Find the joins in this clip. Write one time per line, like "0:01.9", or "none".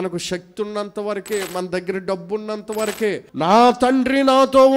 0:03.3

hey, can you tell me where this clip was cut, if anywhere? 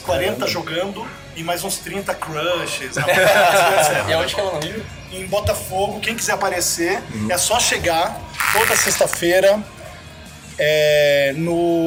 none

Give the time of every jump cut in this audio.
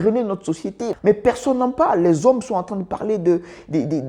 0:00.9

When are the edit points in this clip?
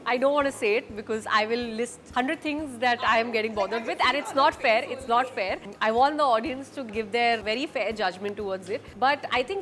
none

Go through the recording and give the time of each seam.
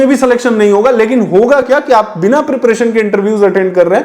0:01.7

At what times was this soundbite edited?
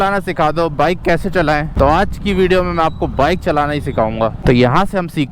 0:04.4

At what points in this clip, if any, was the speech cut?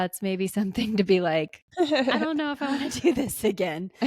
0:01.7

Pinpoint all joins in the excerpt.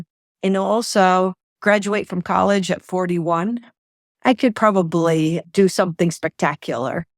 0:05.4

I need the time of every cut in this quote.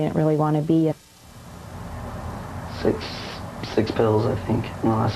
none

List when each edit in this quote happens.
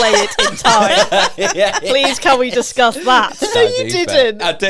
0:03.5

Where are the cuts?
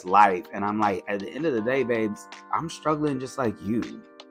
none

